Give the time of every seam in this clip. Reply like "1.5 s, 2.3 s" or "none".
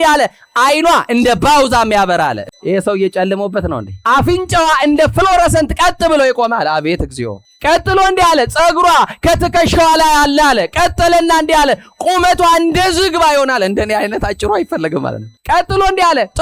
2.4 s, 3.9 s